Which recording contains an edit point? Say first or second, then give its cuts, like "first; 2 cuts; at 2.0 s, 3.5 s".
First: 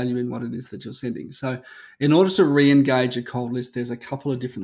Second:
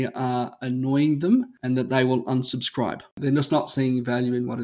second; 2 cuts; at 1.5 s, 3.1 s